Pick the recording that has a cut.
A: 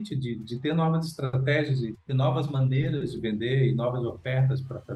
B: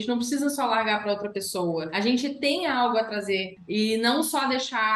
B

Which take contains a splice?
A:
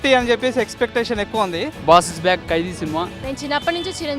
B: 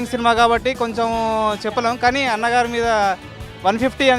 A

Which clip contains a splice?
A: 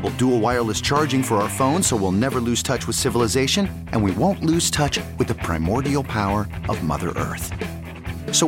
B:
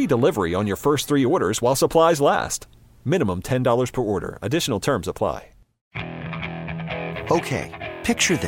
B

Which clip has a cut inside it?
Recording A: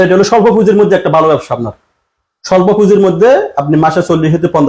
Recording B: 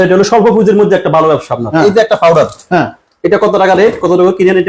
B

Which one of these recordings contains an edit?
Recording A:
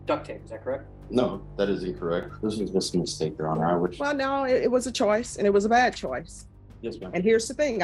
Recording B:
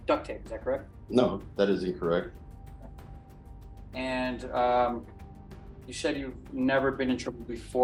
A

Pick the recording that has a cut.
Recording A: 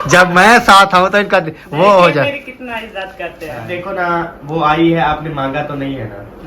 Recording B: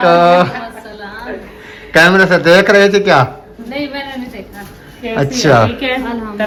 A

